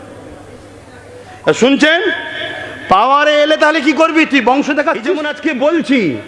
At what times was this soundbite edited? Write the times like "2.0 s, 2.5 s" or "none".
5.3 s